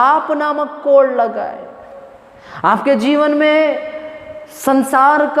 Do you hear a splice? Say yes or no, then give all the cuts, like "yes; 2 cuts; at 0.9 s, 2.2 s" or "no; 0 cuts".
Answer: no; 0 cuts